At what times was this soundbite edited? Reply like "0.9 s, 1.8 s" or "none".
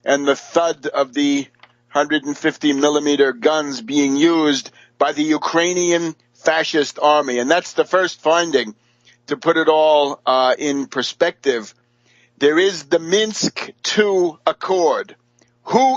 7.1 s